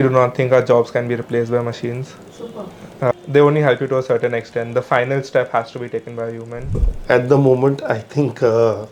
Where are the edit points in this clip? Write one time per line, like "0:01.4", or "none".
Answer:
0:03.1
0:06.9